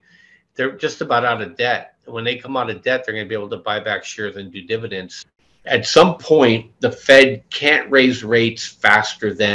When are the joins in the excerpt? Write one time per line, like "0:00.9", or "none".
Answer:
0:05.1